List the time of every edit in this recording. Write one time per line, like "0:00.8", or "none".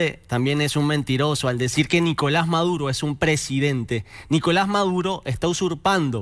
none

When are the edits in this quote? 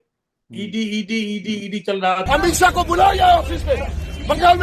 0:02.2

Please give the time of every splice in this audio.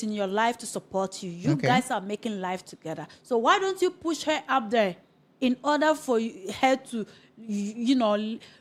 none

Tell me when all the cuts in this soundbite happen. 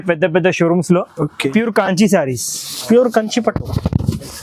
0:01.5

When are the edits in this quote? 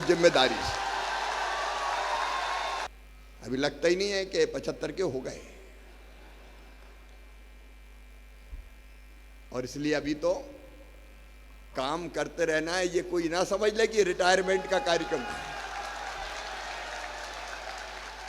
0:02.9

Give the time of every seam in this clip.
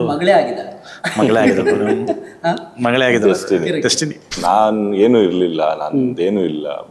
0:04.4

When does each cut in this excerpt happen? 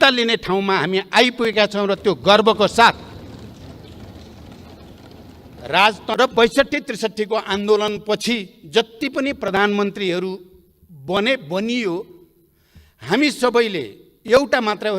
0:06.1

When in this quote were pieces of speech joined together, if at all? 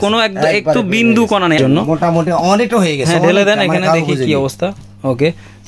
0:01.6

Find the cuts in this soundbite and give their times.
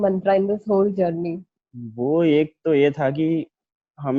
0:01.5

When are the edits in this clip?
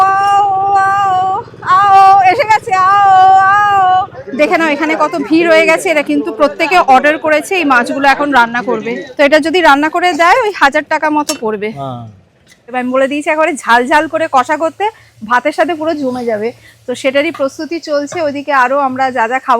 0:04.2
0:09.0
0:12.8

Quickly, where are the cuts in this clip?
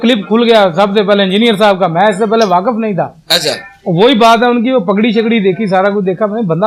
none

